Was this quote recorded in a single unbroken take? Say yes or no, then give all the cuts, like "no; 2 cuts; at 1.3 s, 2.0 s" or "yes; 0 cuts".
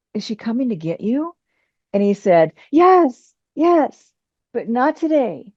yes; 0 cuts